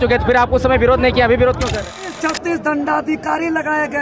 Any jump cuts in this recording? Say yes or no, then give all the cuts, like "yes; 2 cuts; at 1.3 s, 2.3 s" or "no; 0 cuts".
yes; 1 cut; at 1.8 s